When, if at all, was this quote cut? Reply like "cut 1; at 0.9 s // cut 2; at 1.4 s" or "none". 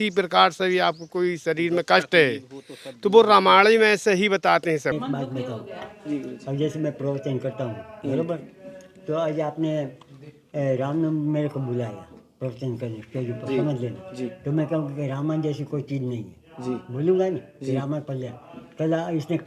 cut 1; at 4.9 s